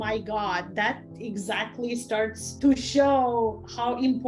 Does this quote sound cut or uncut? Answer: cut